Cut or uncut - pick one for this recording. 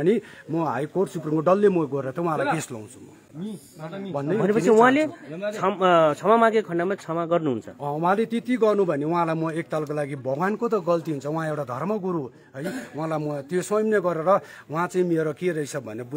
uncut